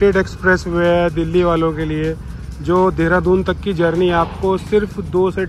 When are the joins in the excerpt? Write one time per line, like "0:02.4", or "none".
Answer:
none